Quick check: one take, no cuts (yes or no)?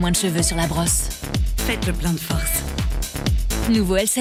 yes